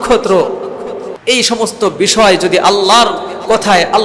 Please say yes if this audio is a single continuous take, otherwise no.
no